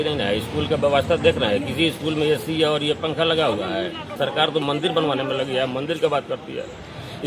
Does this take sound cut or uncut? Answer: cut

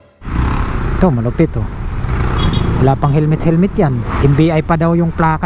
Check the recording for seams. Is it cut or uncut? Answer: cut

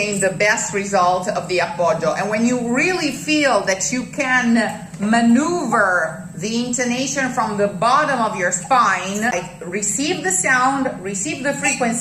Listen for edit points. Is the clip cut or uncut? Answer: cut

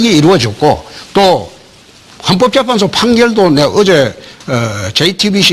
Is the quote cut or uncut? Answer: uncut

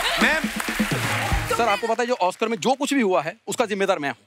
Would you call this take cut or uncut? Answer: cut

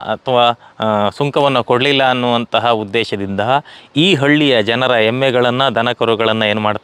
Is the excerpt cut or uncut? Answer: uncut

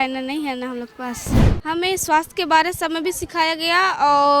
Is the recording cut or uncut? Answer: cut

